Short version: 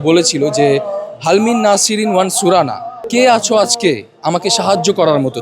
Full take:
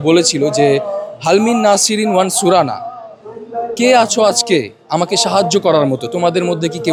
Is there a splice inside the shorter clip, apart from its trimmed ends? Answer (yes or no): yes